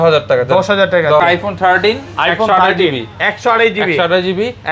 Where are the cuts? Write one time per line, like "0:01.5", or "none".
0:01.2